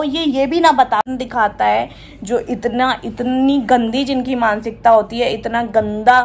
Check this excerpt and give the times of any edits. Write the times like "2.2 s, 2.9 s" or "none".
1.1 s